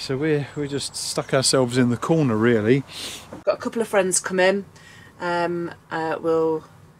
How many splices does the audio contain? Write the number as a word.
one